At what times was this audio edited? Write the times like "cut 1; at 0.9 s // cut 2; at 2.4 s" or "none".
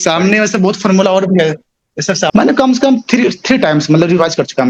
cut 1; at 2.3 s